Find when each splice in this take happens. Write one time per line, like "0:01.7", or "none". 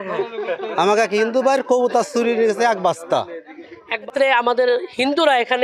0:04.1